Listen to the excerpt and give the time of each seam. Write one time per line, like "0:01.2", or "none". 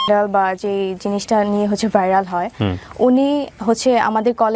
none